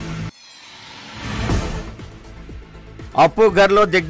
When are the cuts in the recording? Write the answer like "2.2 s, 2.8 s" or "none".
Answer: 1.7 s